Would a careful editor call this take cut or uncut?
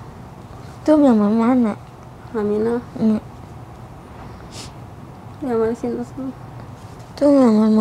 uncut